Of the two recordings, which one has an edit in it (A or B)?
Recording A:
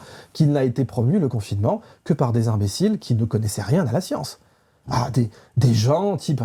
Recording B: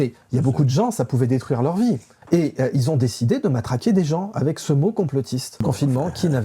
B